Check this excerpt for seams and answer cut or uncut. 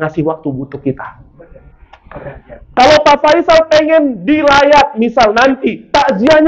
uncut